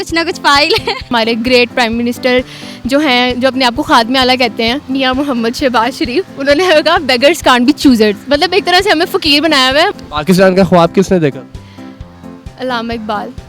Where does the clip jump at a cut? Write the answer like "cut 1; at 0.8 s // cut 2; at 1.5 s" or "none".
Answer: cut 1; at 1.1 s // cut 2; at 9.9 s